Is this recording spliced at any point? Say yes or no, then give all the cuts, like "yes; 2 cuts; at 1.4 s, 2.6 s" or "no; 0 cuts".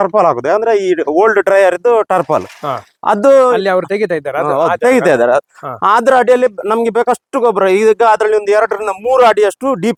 no; 0 cuts